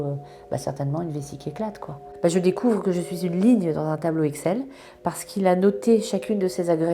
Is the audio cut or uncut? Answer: cut